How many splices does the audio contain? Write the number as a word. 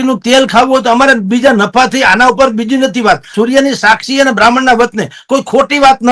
one